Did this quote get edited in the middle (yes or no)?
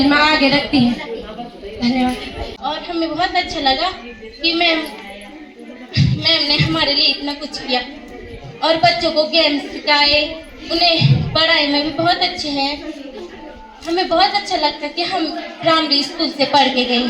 yes